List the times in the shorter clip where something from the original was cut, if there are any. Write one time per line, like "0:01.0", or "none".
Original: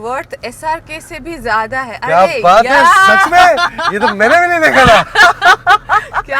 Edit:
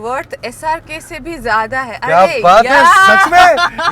none